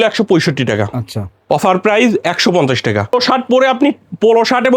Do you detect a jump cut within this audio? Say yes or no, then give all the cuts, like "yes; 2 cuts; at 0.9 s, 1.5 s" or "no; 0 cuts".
yes; 1 cut; at 3.1 s